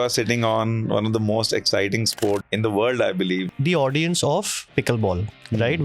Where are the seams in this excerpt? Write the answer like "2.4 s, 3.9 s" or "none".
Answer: 2.5 s, 3.5 s